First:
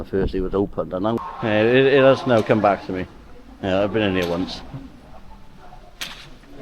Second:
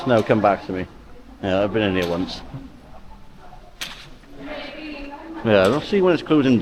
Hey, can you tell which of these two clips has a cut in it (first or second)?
first